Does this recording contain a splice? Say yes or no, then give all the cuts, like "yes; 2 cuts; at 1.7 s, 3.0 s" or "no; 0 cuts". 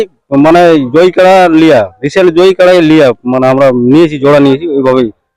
no; 0 cuts